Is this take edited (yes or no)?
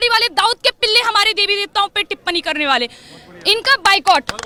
no